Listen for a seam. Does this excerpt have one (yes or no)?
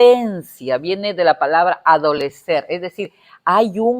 no